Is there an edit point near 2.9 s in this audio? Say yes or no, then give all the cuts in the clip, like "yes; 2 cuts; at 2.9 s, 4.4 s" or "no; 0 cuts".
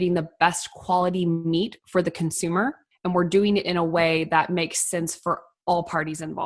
yes; 1 cut; at 2.9 s